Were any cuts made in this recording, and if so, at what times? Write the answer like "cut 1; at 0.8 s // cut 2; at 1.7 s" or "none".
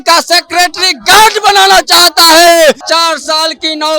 cut 1; at 2.8 s